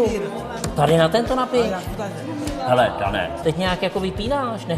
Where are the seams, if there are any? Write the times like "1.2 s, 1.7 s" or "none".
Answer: 3.3 s

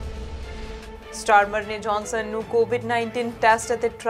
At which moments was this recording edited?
1.1 s

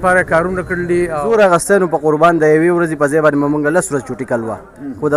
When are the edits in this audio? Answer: 1.2 s

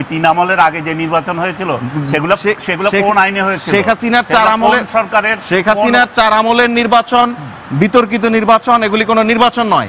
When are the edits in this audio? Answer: none

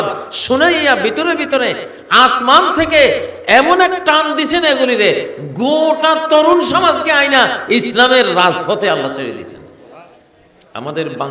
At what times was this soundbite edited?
9.9 s

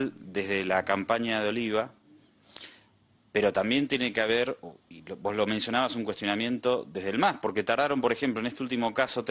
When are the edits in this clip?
none

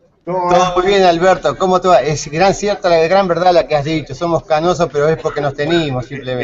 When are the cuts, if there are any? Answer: 3.5 s

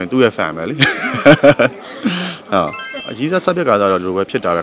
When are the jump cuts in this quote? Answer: 2.9 s

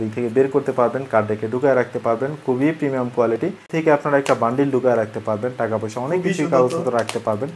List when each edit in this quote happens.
3.7 s

